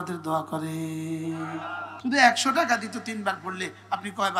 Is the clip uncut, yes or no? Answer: no